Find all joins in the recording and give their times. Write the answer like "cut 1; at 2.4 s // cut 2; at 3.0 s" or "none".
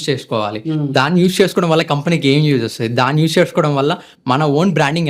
none